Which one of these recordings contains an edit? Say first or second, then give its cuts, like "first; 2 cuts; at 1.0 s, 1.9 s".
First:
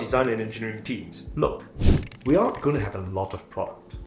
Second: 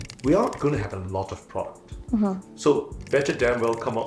second; 1 cut; at 3.0 s